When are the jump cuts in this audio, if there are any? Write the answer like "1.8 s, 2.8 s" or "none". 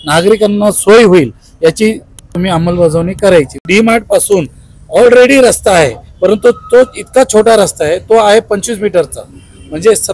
2.3 s, 3.7 s